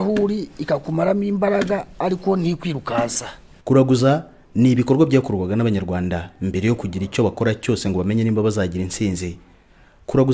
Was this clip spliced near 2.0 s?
no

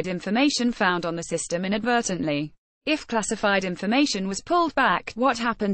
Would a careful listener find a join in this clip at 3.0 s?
yes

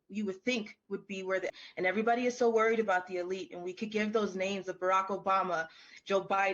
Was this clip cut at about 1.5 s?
yes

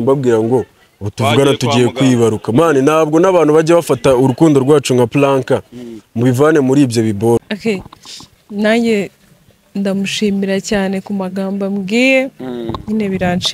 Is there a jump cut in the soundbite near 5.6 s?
no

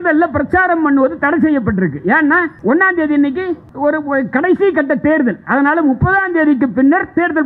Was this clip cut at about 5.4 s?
no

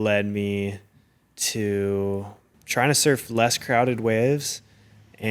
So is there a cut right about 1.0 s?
no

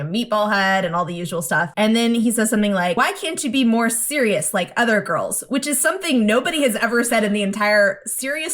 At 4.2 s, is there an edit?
no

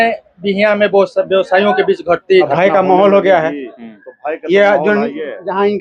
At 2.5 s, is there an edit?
yes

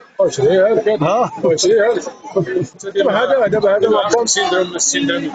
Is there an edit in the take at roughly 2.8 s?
yes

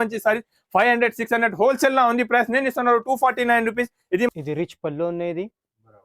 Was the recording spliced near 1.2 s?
no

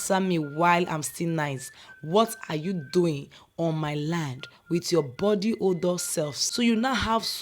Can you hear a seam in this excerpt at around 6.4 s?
yes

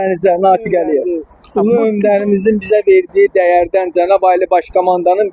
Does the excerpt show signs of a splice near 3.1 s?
no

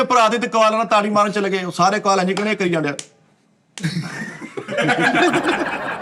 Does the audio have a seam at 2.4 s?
no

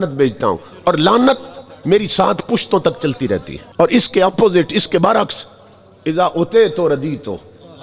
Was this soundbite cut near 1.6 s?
no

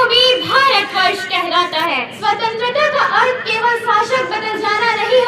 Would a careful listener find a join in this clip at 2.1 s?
yes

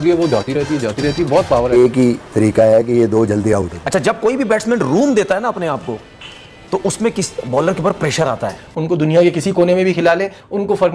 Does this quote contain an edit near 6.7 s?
no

